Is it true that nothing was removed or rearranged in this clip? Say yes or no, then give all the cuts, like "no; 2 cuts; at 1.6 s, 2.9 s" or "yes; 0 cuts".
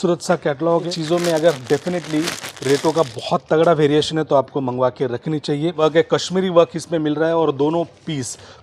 no; 2 cuts; at 1.0 s, 5.8 s